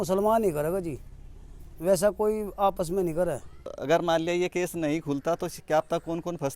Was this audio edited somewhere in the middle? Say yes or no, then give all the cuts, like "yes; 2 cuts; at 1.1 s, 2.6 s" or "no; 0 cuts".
yes; 1 cut; at 3.8 s